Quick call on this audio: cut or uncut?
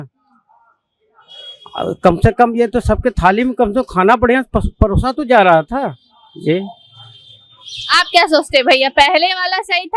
uncut